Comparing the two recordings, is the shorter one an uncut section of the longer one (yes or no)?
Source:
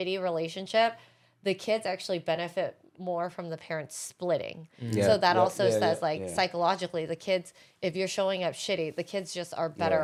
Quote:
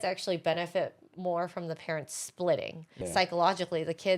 no